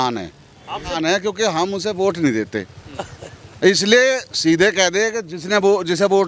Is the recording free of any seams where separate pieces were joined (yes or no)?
no